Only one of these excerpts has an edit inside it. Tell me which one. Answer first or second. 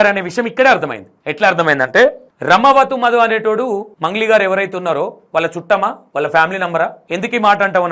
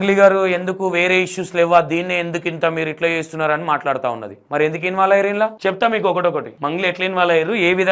second